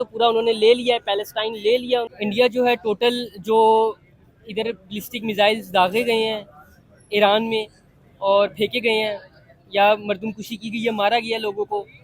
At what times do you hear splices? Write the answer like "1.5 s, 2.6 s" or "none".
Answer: 2.1 s